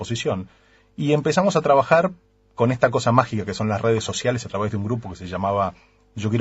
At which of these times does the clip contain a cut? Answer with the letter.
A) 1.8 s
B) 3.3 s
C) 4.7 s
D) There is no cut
D